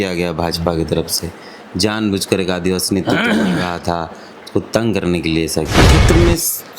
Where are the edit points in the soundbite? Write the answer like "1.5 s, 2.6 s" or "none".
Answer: 5.9 s